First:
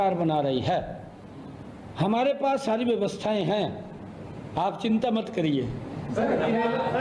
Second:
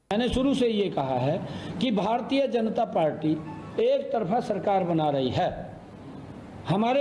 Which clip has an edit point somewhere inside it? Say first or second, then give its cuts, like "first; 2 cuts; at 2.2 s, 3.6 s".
second; 1 cut; at 1.0 s